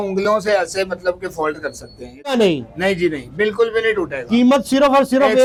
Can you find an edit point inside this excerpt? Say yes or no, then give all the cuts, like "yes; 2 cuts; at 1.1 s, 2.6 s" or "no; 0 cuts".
no; 0 cuts